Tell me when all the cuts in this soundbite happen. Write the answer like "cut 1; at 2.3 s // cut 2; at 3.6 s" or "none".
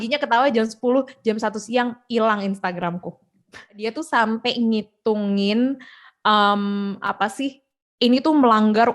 cut 1; at 3.8 s